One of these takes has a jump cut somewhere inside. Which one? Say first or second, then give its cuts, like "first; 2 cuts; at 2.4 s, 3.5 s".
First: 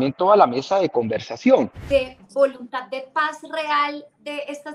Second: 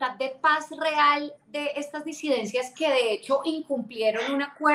first; 1 cut; at 1.8 s